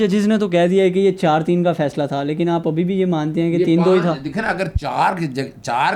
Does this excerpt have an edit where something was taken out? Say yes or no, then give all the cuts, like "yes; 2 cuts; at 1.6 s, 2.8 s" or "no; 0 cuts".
no; 0 cuts